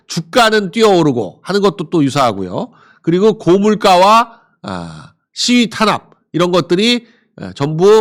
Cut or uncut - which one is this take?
uncut